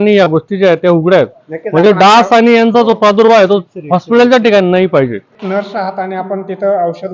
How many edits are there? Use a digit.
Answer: 1